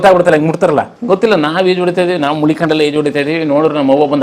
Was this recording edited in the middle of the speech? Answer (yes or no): yes